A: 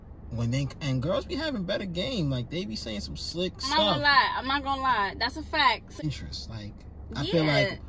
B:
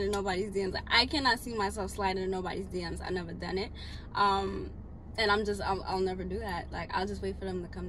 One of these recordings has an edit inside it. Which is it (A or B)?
A